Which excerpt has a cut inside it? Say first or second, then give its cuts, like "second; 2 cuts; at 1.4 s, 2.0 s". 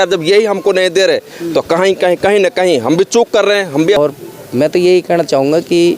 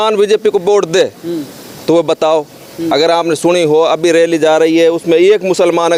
first; 1 cut; at 4.0 s